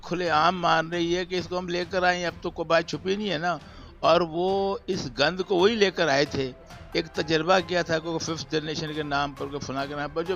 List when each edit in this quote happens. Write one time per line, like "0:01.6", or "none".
none